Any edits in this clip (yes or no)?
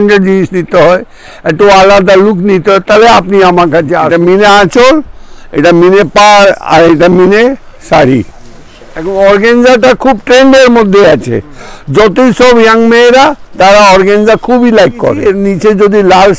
yes